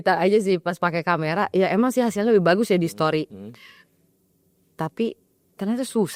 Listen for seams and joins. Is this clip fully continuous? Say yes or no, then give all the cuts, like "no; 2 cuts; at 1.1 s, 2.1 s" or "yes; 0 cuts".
yes; 0 cuts